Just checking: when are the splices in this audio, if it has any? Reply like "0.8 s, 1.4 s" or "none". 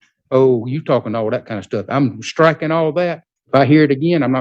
3.3 s

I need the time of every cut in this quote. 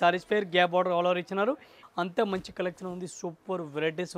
1.7 s

